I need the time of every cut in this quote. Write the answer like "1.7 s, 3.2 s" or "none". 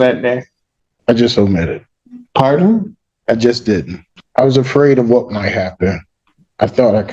0.9 s, 3.9 s